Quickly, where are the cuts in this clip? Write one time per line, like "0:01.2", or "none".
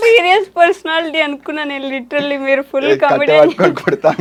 none